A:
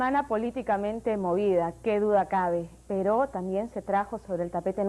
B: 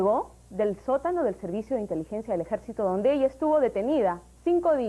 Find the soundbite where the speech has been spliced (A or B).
B